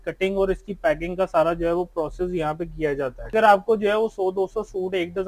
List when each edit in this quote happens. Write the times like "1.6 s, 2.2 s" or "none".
3.3 s